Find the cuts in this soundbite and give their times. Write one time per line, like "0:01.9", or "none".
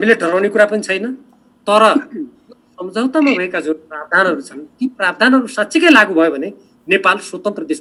none